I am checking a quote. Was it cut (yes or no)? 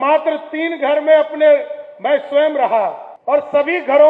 yes